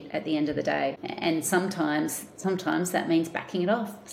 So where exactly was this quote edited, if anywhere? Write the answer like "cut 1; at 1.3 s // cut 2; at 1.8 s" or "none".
cut 1; at 1.1 s